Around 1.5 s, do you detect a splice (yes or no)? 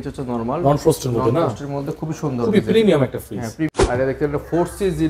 no